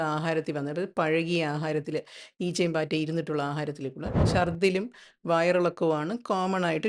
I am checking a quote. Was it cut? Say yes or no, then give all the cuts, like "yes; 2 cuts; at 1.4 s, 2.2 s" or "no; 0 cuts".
yes; 1 cut; at 4.3 s